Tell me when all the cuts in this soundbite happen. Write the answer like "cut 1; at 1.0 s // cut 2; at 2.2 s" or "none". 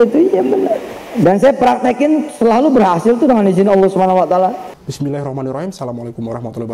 cut 1; at 1.0 s // cut 2; at 4.8 s